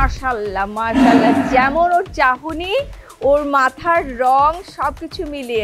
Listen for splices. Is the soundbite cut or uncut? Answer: uncut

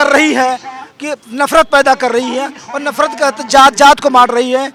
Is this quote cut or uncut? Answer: uncut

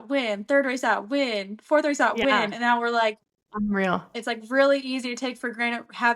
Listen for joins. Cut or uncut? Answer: cut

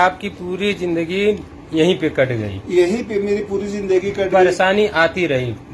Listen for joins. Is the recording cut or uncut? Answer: uncut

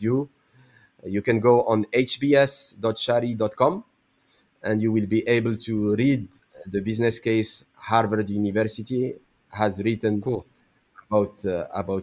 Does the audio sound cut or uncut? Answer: uncut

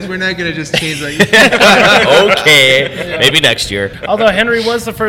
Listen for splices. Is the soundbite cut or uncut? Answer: cut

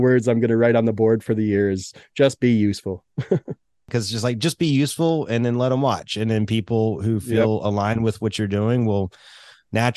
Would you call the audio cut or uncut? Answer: cut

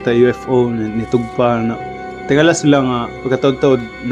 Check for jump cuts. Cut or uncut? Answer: cut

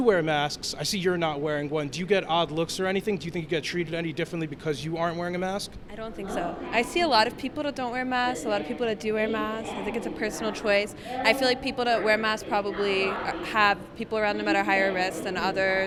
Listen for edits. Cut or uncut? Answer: uncut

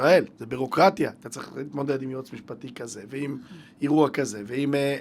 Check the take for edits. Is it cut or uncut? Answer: uncut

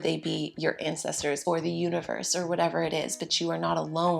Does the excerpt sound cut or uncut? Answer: cut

